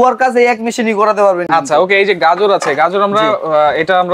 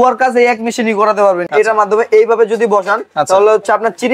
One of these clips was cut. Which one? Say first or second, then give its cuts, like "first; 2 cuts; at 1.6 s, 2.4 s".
second; 1 cut; at 1.5 s